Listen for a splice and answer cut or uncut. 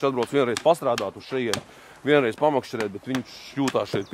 uncut